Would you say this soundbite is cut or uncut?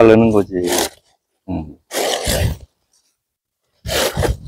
uncut